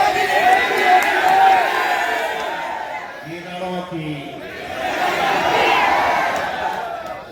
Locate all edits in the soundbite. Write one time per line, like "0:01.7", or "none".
none